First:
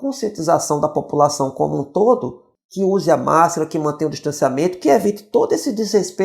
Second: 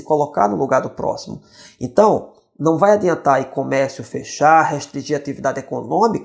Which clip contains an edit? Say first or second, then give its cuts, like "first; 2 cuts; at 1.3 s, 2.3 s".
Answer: first; 1 cut; at 2.7 s